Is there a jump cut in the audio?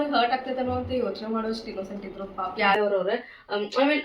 yes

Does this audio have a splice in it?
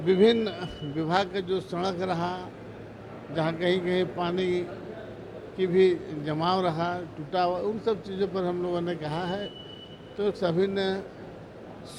no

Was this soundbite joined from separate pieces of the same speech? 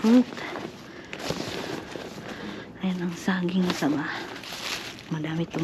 no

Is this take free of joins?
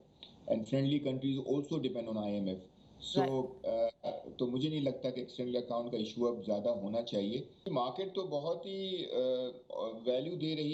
no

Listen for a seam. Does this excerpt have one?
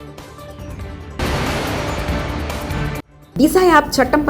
yes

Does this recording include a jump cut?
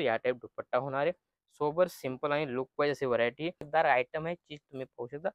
yes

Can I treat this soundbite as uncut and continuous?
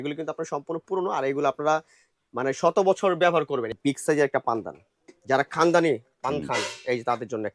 no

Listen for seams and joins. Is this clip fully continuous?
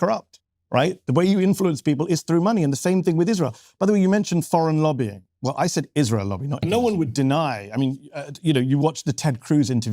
no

